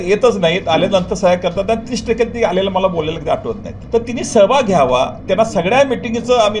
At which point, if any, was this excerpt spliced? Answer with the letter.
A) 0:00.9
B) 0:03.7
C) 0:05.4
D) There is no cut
B